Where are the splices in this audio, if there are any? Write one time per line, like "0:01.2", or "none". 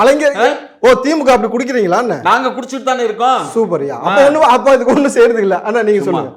none